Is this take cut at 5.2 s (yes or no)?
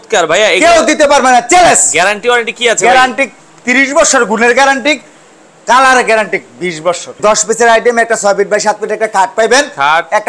no